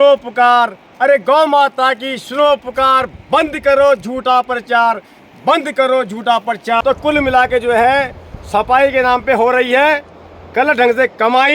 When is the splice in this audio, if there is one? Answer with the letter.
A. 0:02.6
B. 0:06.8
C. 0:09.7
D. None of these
B